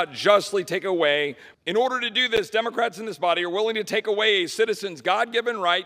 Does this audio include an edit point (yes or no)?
no